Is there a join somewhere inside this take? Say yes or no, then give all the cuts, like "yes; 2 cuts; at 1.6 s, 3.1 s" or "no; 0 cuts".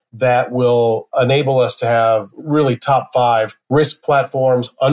yes; 1 cut; at 2.3 s